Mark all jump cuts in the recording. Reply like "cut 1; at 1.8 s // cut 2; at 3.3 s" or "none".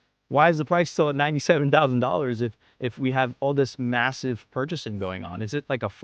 none